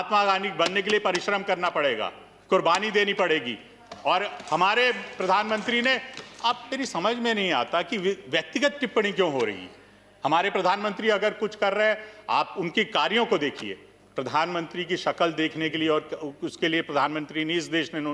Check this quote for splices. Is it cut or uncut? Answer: uncut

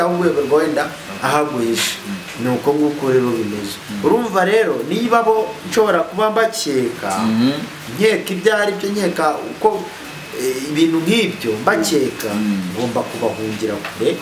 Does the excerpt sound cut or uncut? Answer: uncut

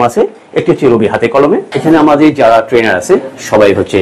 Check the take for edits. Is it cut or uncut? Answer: cut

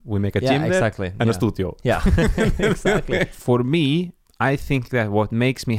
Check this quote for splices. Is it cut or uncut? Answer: cut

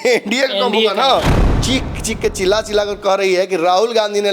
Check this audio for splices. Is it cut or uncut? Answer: cut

